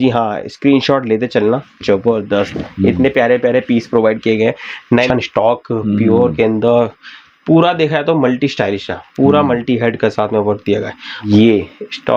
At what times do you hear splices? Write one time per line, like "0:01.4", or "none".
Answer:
0:05.1
0:11.2